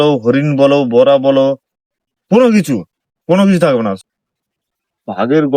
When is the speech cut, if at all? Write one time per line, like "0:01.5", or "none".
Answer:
0:04.0